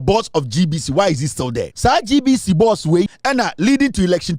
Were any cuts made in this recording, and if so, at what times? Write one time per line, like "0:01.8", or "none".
0:01.6
0:03.2